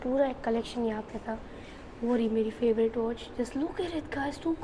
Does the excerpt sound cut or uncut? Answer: uncut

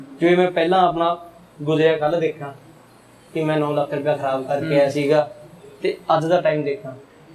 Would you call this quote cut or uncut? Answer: uncut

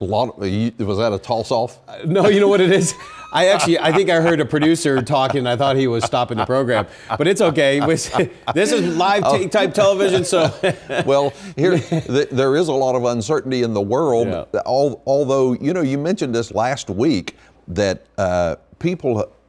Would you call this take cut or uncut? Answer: uncut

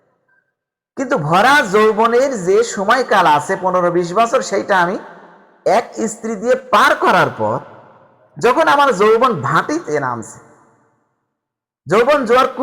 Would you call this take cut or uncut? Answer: uncut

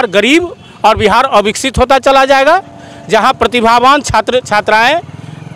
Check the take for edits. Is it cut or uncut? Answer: uncut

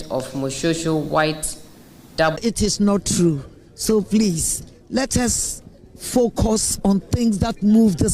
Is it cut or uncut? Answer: cut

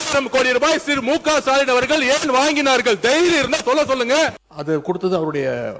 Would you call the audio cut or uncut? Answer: cut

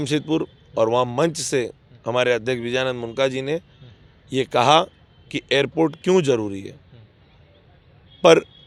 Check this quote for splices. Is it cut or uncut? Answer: uncut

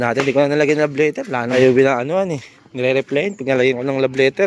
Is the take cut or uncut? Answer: cut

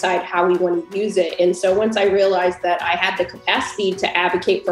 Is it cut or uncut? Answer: uncut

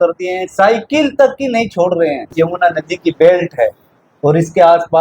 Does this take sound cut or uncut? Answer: cut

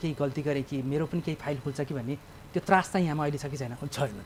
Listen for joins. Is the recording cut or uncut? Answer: uncut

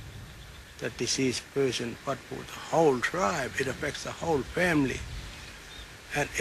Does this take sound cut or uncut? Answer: uncut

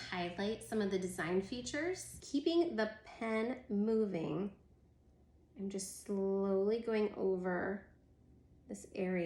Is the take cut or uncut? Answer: cut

